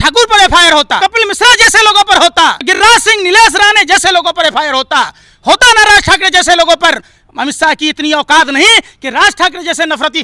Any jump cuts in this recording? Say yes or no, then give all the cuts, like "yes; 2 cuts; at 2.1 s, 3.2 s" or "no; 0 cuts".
yes; 2 cuts; at 1.0 s, 2.6 s